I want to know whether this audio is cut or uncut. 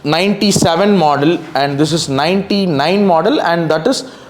uncut